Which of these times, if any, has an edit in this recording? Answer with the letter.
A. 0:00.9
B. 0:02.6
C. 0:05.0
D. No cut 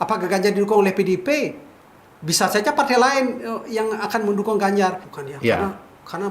C